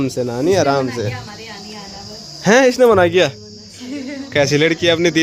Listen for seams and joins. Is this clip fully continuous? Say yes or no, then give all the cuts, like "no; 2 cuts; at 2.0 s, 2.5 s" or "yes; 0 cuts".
yes; 0 cuts